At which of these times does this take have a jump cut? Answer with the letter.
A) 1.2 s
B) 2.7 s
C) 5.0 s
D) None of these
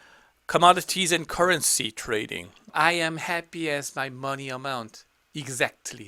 B